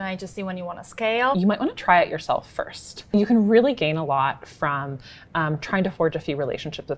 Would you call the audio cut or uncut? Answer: cut